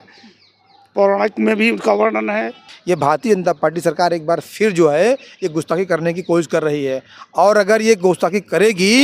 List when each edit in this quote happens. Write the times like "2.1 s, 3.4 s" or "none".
2.7 s